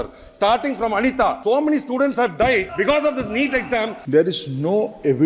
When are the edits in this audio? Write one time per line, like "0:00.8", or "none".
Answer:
0:01.4
0:02.7
0:04.0

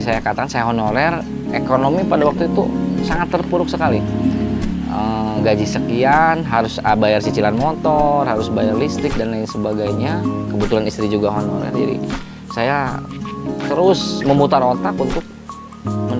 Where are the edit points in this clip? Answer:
none

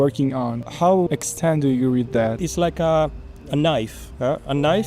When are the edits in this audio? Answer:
0:01.1
0:02.4

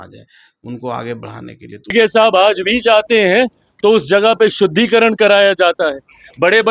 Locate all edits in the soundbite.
0:01.9

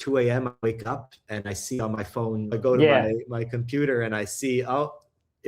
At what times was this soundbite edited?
0:02.5

